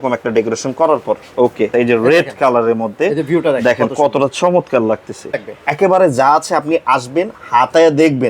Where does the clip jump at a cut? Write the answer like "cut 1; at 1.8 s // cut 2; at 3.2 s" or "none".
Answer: cut 1; at 1.7 s // cut 2; at 5.4 s